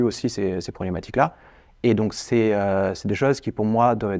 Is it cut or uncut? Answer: uncut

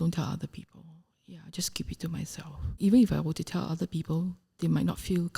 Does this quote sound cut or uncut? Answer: cut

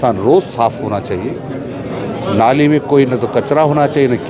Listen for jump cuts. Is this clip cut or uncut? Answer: uncut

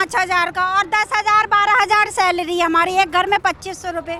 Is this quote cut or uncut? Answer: uncut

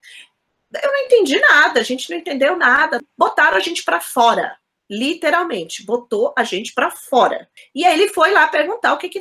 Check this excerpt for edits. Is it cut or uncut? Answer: cut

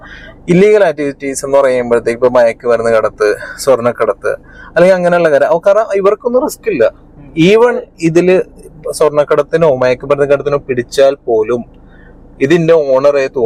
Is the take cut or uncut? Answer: uncut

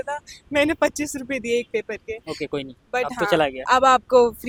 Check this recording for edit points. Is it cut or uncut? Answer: uncut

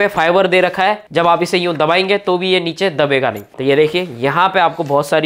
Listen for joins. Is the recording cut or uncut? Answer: cut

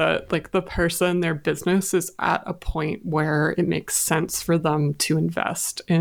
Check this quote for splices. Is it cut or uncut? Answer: uncut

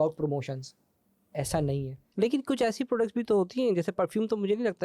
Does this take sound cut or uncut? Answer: cut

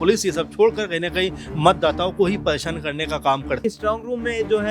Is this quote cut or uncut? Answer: cut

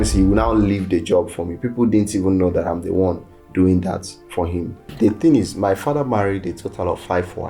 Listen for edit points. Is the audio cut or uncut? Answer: cut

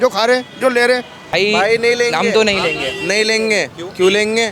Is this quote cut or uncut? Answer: cut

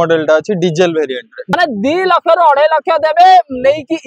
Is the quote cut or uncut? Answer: cut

